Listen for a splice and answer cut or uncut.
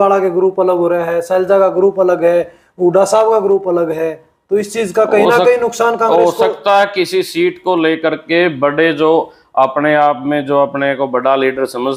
uncut